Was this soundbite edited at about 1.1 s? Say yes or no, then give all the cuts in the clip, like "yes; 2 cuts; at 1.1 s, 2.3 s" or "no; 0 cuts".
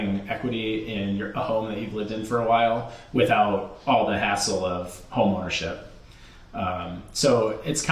no; 0 cuts